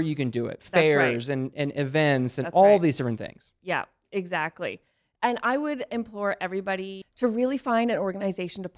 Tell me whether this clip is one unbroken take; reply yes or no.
no